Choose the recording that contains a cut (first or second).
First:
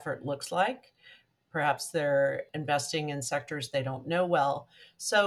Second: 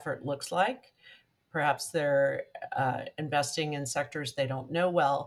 first